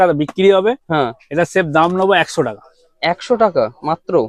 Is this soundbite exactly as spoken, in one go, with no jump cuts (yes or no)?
yes